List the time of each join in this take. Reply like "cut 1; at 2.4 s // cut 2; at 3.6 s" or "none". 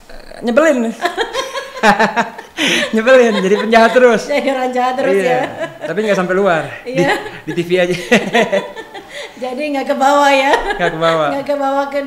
none